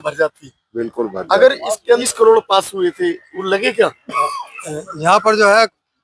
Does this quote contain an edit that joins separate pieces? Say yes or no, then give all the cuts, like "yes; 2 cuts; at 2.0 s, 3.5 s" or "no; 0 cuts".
yes; 1 cut; at 2.0 s